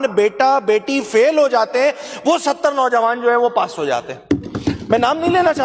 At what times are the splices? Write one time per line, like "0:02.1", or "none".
none